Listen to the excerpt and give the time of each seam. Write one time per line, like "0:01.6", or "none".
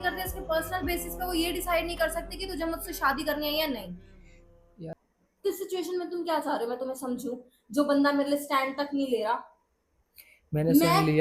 0:04.9